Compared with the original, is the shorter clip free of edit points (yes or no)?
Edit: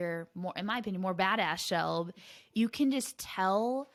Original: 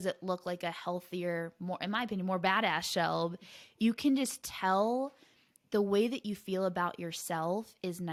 yes